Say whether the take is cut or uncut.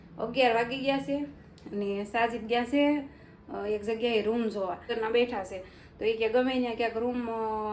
cut